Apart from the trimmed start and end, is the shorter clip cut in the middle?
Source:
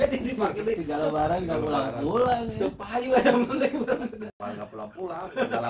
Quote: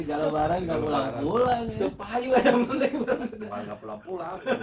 yes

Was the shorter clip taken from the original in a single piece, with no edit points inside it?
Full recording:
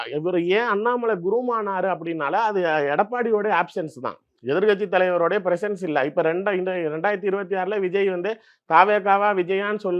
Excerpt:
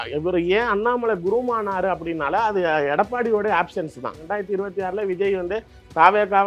no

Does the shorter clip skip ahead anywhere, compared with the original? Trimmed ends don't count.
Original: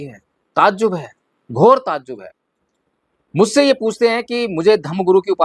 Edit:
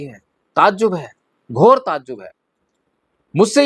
no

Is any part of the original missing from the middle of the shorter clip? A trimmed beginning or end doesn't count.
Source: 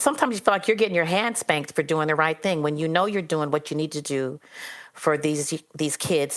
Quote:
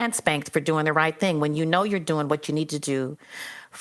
no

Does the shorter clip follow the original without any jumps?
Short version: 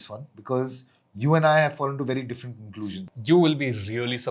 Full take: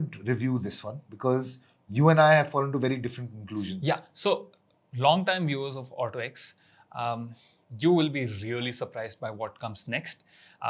no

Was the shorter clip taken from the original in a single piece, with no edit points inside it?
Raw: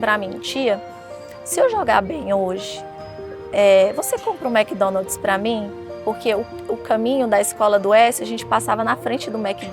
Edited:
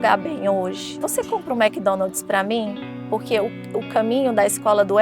no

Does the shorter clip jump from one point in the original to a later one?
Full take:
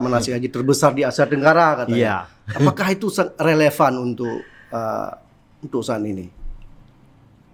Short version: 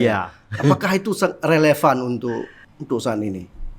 yes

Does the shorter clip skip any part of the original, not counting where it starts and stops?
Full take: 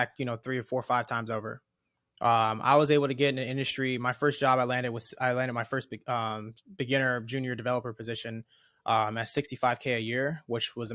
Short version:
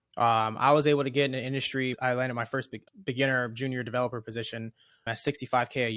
yes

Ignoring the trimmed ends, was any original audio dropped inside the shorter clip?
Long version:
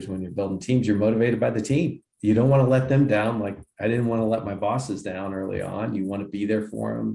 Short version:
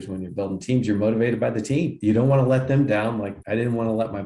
yes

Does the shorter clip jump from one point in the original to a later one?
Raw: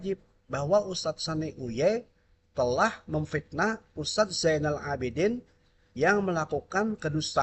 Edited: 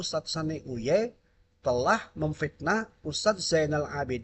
no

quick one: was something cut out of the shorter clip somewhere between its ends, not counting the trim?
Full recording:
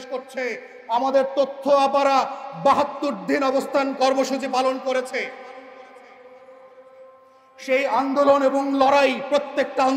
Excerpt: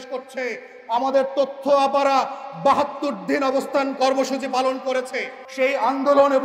yes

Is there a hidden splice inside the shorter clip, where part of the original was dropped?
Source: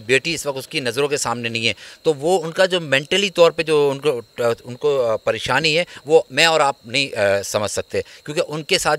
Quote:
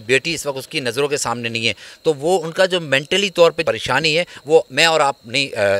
yes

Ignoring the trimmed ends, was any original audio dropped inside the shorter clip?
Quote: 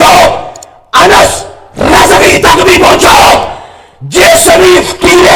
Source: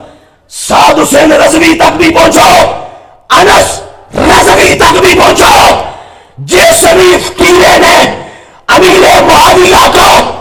no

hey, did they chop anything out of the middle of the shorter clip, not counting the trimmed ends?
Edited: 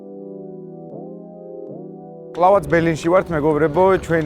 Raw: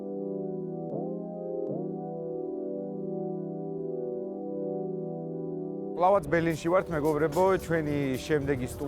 yes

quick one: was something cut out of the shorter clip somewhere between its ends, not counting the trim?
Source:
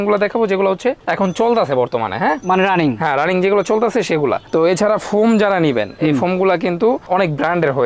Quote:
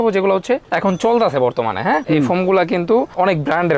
yes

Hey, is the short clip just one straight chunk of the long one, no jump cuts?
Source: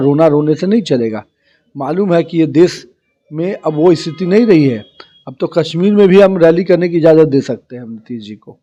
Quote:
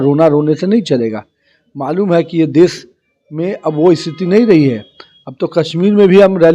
yes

